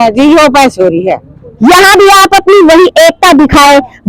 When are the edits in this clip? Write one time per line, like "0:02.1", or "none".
0:01.5

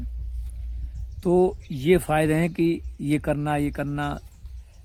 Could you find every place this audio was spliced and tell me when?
none

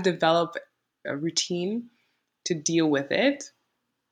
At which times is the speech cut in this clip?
0:00.9

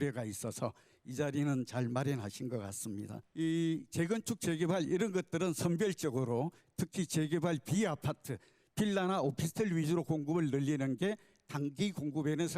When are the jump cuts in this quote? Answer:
0:03.2

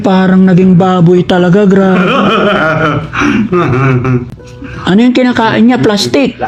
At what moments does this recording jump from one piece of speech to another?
none

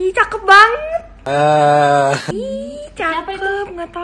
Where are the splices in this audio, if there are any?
none

